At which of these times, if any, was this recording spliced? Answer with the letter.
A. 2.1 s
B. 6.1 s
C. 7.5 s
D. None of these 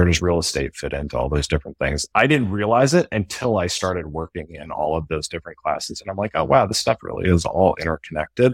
A